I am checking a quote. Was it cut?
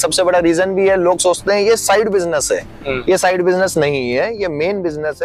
no; 0 cuts

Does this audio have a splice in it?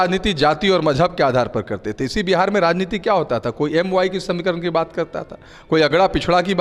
no; 0 cuts

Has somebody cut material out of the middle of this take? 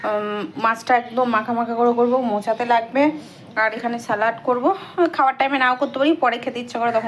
no; 0 cuts

